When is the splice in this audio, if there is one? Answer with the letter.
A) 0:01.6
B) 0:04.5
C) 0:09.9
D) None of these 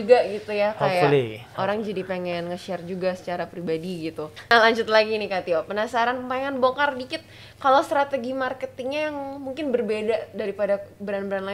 B